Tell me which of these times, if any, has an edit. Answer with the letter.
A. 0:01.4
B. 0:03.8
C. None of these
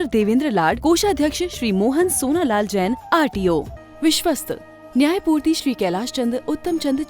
B